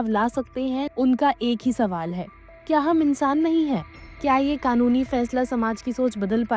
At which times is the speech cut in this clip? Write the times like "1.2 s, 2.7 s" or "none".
0.9 s, 4.1 s